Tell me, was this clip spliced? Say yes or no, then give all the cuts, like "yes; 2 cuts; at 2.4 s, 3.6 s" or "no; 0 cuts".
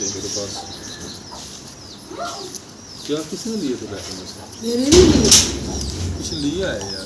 no; 0 cuts